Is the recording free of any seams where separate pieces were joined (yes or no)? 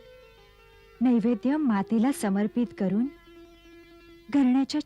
yes